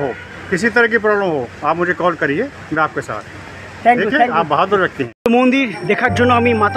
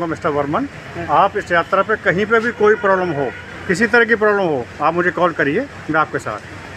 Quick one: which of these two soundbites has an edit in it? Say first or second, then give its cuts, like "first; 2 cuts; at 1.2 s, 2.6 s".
first; 1 cut; at 5.0 s